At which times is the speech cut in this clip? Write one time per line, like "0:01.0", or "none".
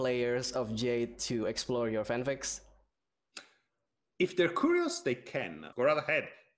0:05.6

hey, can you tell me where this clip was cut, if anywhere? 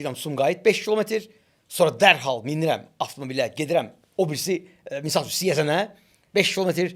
none

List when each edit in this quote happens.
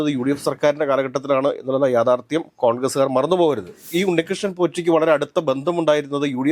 0:03.9

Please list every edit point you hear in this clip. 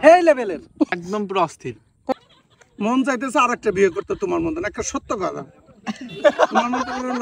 0:00.9
0:02.1

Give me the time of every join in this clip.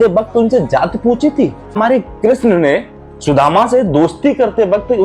0:01.8

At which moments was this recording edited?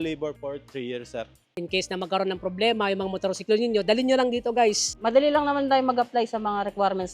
0:01.5
0:04.9

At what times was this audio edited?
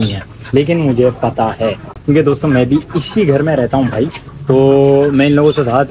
none

